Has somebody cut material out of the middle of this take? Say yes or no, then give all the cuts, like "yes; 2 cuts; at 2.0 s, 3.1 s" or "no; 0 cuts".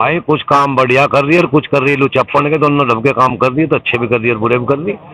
no; 0 cuts